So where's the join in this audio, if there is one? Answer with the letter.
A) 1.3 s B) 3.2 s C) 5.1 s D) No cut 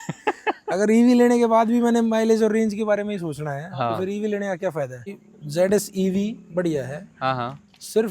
C